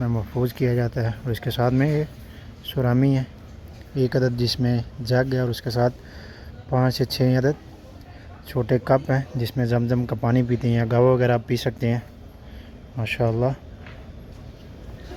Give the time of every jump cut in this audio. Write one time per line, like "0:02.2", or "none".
none